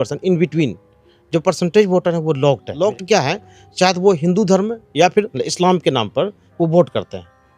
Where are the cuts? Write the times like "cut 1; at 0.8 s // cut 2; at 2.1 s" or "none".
cut 1; at 2.7 s // cut 2; at 5.3 s